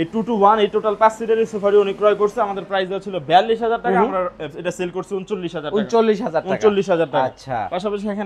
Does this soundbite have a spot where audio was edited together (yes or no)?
no